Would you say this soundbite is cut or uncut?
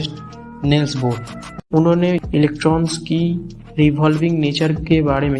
uncut